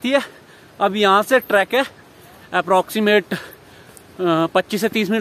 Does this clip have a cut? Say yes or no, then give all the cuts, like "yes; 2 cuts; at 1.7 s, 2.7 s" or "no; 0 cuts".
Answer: no; 0 cuts